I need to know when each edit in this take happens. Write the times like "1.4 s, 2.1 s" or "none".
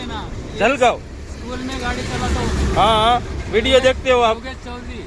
none